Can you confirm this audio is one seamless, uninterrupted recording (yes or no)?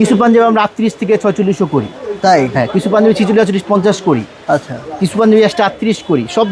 yes